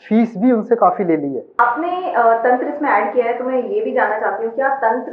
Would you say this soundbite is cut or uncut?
cut